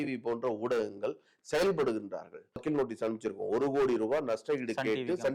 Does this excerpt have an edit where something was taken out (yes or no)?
yes